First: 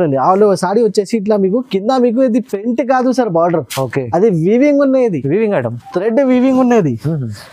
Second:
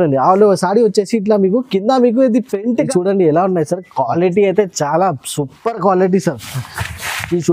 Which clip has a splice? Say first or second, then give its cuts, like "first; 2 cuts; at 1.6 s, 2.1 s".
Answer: second; 1 cut; at 2.9 s